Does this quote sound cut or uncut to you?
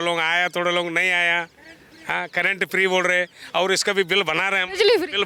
uncut